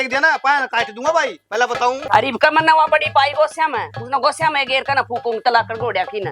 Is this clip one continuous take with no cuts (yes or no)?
no